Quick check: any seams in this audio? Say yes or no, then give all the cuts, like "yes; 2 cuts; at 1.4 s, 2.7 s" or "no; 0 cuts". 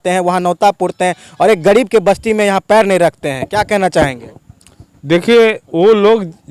no; 0 cuts